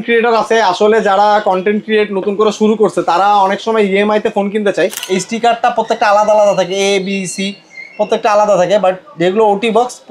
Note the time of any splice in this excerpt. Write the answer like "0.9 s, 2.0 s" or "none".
5.0 s